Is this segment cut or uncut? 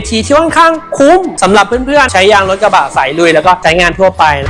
uncut